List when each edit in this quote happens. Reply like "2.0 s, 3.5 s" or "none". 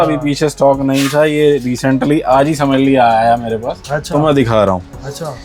none